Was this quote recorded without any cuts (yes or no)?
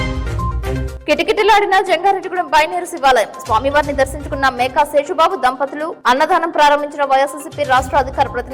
no